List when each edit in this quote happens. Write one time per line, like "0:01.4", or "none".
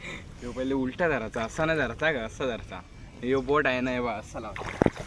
none